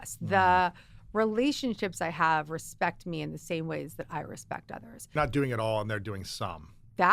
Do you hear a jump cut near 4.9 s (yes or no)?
yes